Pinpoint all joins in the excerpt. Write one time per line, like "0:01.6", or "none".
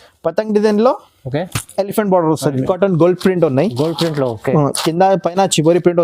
0:02.6